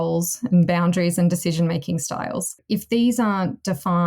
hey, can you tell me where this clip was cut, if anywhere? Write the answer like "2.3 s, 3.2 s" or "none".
2.6 s